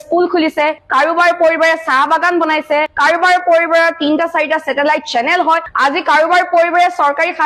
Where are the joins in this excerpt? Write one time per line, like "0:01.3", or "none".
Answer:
0:05.7